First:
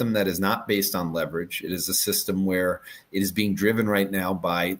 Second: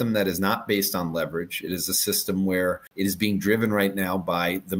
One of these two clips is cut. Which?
second; 1 cut; at 2.9 s

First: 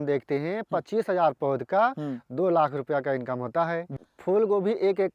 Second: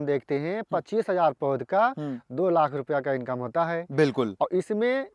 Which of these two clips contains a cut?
first; 1 cut; at 3.9 s

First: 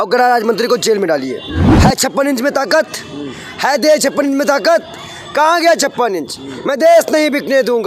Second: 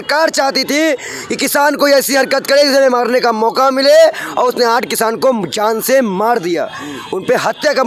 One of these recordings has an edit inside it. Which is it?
first; 1 cut; at 1.6 s

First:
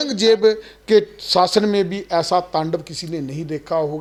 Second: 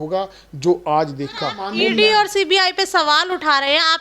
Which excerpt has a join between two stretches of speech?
second; 1 cut; at 1.6 s

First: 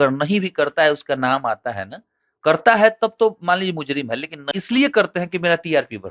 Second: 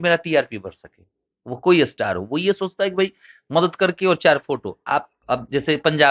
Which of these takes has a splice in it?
first; 1 cut; at 4.4 s

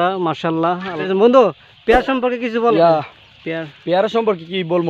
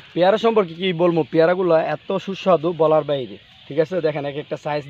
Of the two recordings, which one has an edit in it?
first; 2 cuts; at 1.0 s, 2.8 s

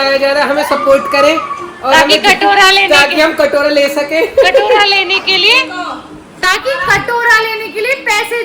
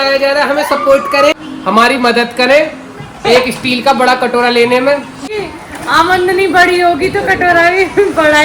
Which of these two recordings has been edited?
second; 2 cuts; at 1.5 s, 5.2 s

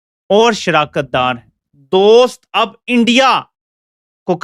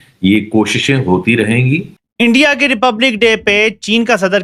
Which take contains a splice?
second; 1 cut; at 1.9 s

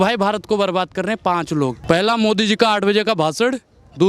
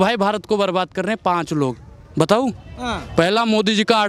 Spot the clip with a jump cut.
first; 1 cut; at 1.8 s

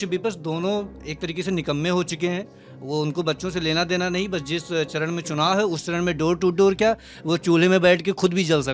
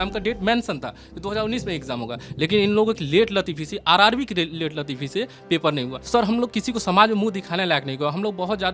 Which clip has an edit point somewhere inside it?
second; 1 cut; at 6.0 s

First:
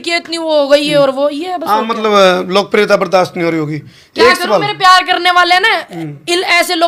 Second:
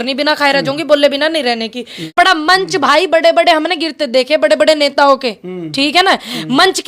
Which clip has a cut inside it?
second; 1 cut; at 2.1 s

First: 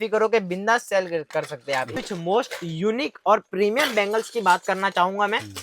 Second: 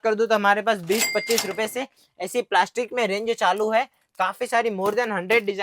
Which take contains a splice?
first; 1 cut; at 1.9 s

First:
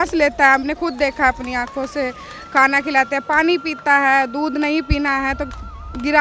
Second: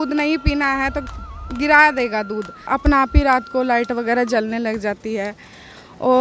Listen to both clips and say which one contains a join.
second; 1 cut; at 2.7 s

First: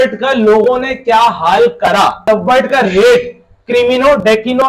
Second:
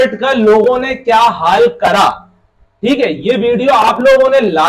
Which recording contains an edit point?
first; 1 cut; at 2.2 s

